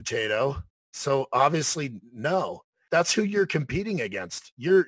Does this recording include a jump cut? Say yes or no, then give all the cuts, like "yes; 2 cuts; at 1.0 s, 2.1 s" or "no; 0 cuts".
yes; 1 cut; at 2.7 s